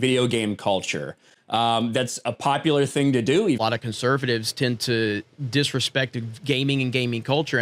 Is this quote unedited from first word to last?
no; 1 cut; at 3.6 s

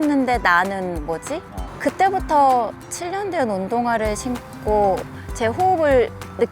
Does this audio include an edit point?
yes; 2 cuts; at 1.7 s, 5.1 s

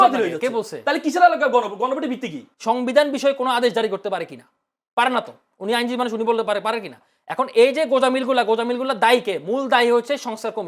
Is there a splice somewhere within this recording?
yes; 1 cut; at 2.5 s

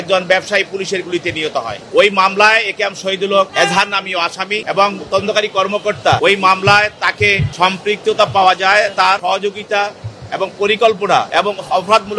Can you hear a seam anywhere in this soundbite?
yes; 7 cuts; at 1.8 s, 3.5 s, 4.6 s, 6.2 s, 7.5 s, 9.2 s, 11.3 s

